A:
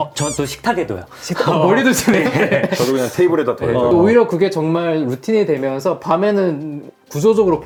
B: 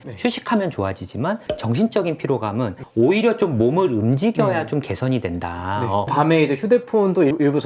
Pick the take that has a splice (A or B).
B